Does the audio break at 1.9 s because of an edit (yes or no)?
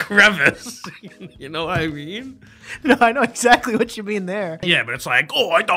no